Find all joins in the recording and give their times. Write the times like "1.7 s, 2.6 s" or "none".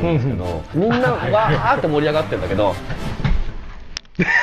none